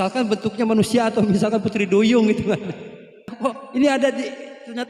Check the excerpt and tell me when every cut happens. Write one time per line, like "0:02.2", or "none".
0:03.3

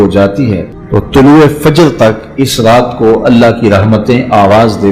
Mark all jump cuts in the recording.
0:01.1

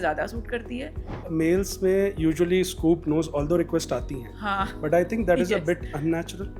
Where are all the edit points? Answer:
0:01.2

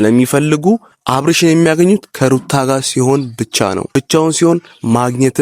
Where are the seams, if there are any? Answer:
0:01.0
0:03.9

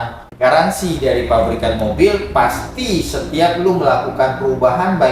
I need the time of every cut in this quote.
none

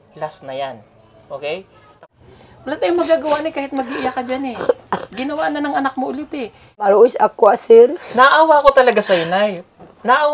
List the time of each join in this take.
0:02.2
0:06.9

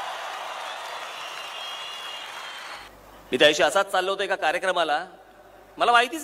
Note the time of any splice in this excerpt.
0:02.8

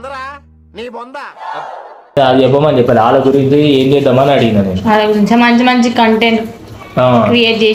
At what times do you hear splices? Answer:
none

